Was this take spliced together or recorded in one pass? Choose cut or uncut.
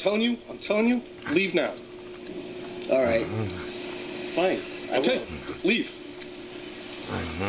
uncut